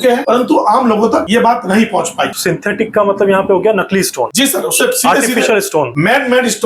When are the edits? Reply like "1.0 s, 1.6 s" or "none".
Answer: none